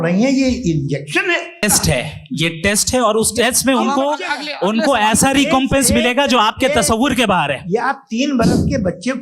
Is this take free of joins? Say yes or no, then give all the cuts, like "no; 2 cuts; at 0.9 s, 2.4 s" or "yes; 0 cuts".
no; 1 cut; at 1.6 s